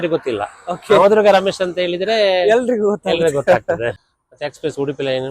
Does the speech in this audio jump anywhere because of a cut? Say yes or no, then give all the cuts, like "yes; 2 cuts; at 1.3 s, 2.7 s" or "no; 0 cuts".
yes; 1 cut; at 4.0 s